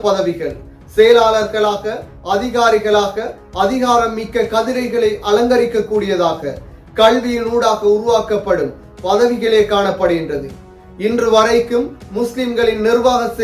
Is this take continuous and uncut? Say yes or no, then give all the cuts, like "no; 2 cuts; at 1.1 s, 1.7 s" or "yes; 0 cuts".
yes; 0 cuts